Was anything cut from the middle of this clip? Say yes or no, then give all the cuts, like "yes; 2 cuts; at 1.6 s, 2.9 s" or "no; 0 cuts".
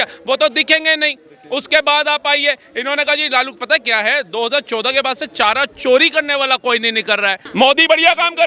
yes; 1 cut; at 7.4 s